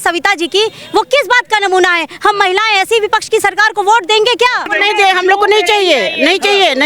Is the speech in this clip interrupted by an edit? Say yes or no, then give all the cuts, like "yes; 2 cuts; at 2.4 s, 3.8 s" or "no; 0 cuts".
yes; 1 cut; at 4.8 s